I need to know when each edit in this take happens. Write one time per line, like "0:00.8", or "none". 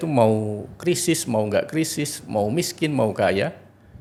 none